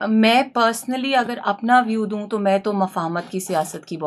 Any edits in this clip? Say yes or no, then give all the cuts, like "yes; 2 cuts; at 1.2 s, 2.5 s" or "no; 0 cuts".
no; 0 cuts